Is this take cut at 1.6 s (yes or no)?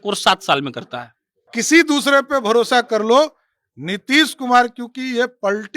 yes